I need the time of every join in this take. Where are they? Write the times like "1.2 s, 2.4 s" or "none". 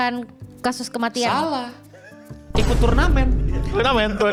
none

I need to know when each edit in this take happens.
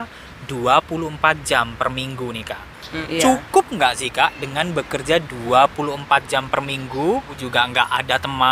2.9 s, 7.4 s

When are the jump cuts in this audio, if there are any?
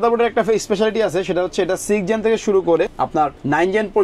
3.1 s

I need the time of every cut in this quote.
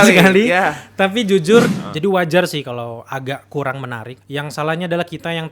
1.7 s, 4.1 s

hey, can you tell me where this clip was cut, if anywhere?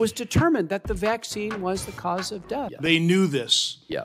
2.7 s

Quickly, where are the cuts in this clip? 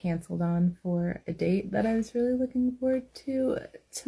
none

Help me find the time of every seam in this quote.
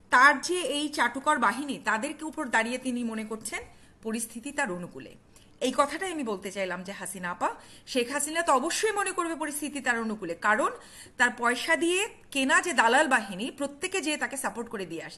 none

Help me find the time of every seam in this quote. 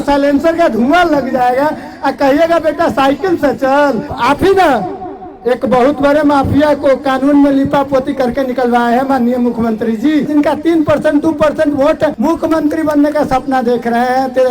4.1 s, 10.3 s, 12.2 s

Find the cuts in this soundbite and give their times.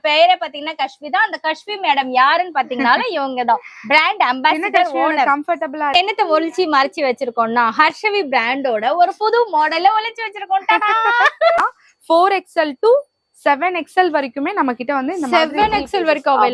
5.9 s, 11.6 s

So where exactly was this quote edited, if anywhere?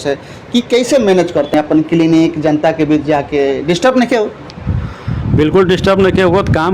1.5 s

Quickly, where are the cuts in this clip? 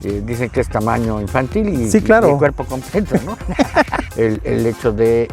4.0 s

